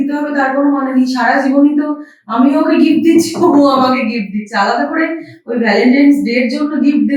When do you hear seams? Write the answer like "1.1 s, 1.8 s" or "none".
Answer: none